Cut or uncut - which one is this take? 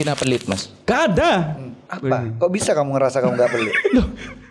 cut